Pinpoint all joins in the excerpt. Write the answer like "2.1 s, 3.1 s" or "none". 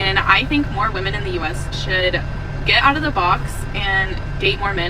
none